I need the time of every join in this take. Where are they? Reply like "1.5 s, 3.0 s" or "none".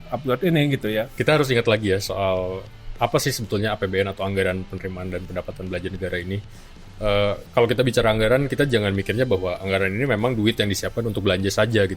1.1 s

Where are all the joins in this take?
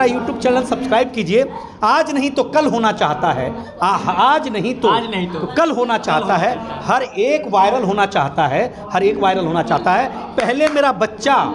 none

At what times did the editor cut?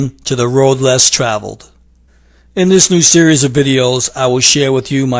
none

